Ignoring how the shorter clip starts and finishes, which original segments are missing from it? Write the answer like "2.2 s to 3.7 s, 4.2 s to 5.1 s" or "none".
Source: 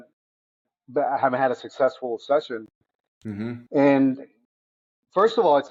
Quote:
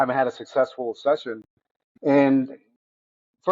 3.1 s to 3.5 s